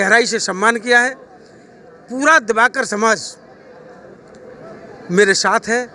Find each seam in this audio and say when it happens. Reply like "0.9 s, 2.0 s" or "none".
none